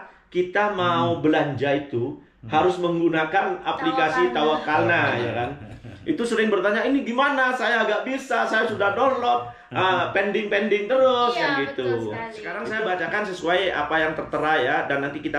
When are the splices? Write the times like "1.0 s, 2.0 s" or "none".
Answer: 12.4 s

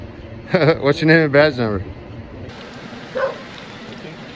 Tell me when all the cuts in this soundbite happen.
2.4 s

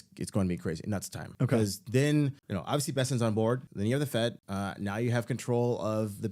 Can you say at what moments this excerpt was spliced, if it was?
1.2 s, 2.5 s, 3.7 s, 4.4 s

